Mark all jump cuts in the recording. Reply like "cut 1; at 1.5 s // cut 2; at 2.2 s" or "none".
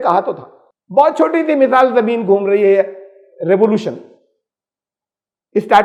none